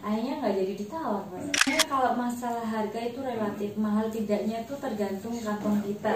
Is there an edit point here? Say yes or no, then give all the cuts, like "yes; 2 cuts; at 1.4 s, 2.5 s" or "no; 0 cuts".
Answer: yes; 1 cut; at 1.6 s